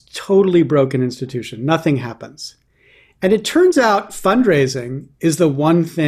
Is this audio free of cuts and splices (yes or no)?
yes